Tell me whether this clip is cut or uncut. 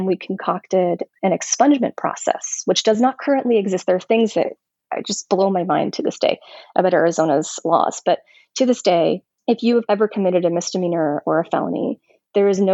uncut